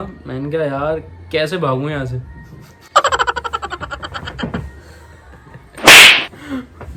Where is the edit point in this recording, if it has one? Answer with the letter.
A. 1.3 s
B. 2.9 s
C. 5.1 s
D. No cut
D